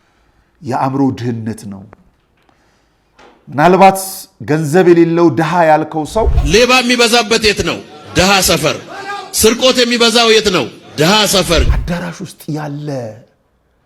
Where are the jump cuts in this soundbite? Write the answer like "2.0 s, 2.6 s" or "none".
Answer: 6.4 s, 11.8 s